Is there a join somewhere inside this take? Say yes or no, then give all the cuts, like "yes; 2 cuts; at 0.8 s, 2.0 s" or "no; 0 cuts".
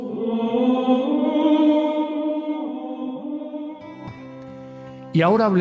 yes; 1 cut; at 4.5 s